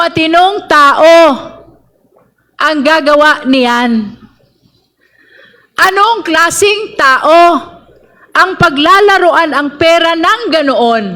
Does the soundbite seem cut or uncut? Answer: uncut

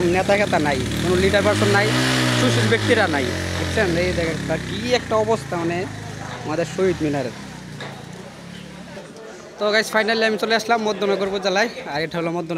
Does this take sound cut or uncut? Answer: cut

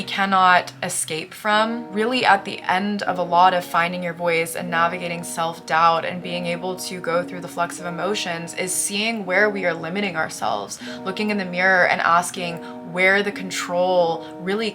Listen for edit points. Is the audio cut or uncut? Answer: cut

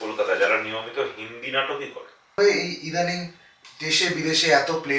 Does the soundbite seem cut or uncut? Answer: cut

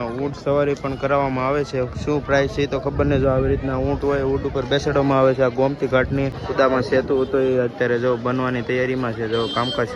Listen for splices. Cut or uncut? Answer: cut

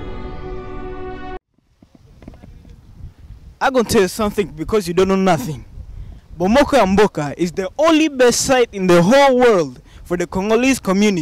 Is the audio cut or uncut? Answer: cut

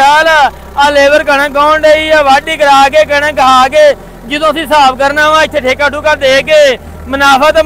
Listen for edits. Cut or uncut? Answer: uncut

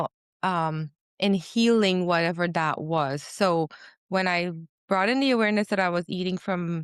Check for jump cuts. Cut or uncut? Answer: uncut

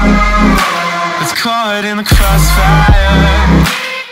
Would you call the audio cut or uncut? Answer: cut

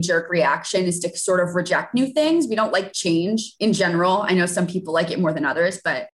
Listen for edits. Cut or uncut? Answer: cut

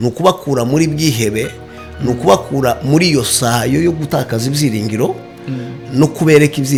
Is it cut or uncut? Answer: uncut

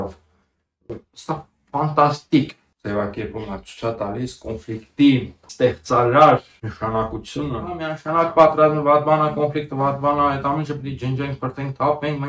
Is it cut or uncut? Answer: cut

